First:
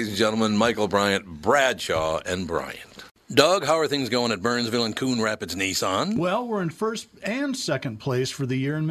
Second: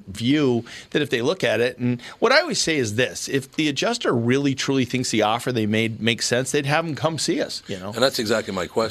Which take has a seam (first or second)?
first